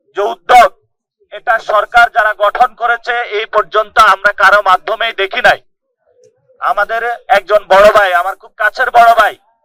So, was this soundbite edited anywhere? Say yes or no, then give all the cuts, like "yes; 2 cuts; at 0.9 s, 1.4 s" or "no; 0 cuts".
no; 0 cuts